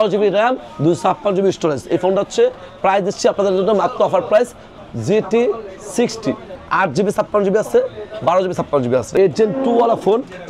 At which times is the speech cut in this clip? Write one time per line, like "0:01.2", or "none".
0:04.7
0:06.5
0:09.1